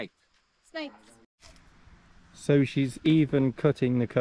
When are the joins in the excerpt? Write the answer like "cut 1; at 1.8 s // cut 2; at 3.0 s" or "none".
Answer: cut 1; at 1.2 s